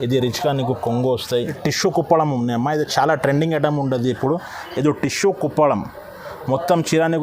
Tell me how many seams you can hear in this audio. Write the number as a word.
one